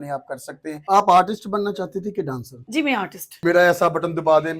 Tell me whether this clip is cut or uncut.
cut